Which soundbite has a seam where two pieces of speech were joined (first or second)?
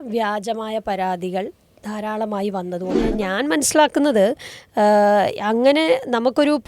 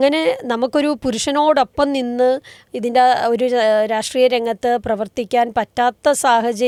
first